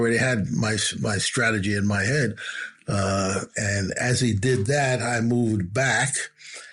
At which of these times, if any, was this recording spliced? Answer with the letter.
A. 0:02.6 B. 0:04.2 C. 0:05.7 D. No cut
D